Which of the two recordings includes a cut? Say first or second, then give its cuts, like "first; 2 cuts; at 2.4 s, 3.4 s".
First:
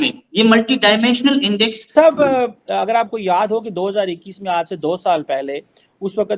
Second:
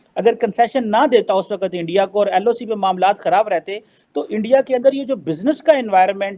first; 1 cut; at 1.9 s